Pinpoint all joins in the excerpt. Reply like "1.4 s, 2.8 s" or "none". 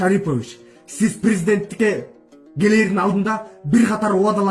none

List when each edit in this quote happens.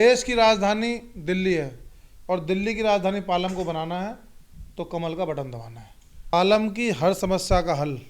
6.3 s

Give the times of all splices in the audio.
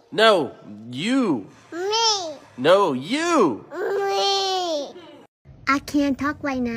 5.5 s

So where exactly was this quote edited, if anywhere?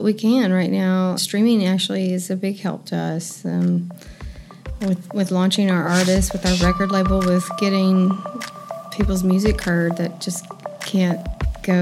1.2 s

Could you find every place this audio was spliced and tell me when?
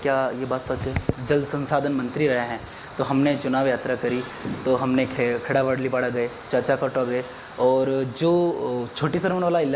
1.2 s

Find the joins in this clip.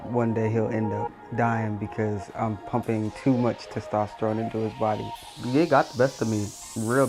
5.1 s

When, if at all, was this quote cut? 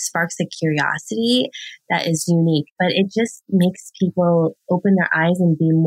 2.7 s

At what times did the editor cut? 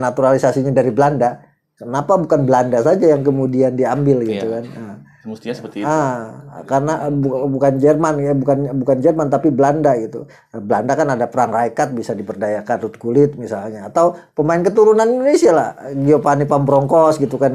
none

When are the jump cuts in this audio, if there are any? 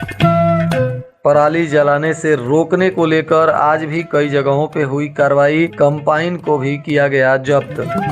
1.0 s

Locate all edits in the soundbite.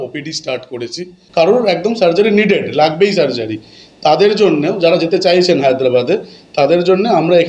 1.2 s

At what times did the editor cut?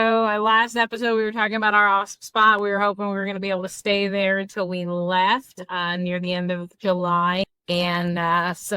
7.5 s

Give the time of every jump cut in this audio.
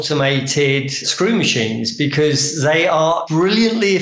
1.0 s, 3.2 s

